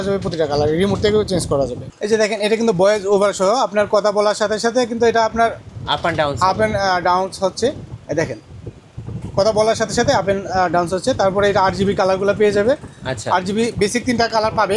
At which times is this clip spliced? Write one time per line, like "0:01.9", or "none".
0:01.8